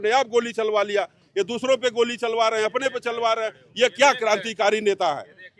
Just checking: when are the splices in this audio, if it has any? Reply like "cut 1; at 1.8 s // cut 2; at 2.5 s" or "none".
none